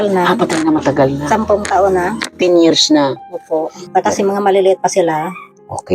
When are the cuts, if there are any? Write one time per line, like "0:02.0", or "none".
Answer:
0:03.8